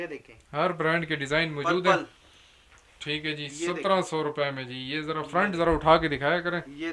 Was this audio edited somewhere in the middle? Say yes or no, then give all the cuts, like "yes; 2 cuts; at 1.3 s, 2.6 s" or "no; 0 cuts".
no; 0 cuts